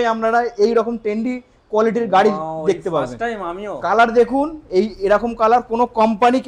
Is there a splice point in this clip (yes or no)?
no